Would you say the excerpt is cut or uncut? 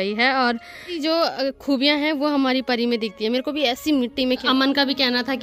cut